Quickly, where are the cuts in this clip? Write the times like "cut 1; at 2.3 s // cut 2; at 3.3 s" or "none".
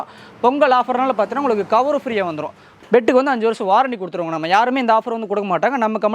cut 1; at 2.7 s